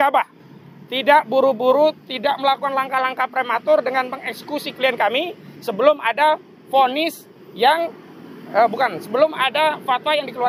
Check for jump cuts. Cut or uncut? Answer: uncut